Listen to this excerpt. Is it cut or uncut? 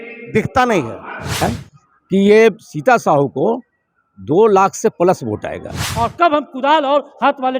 cut